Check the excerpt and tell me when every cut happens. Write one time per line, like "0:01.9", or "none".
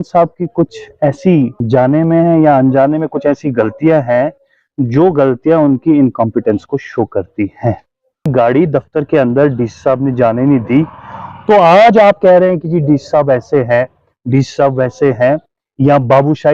0:01.6
0:08.2